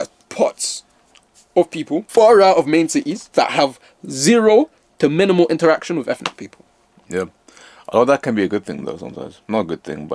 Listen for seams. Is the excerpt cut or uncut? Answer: cut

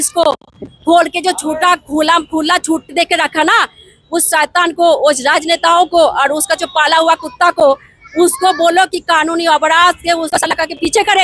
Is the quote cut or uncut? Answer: cut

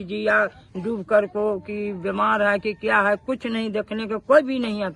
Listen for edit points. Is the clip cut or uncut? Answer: uncut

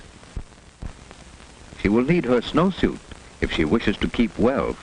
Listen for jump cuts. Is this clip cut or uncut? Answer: uncut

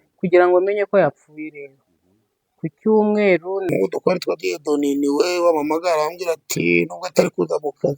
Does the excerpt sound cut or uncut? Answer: cut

